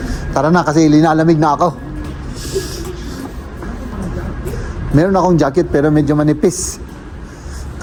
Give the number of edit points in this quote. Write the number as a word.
zero